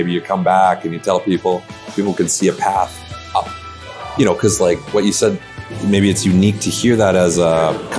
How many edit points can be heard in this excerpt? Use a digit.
0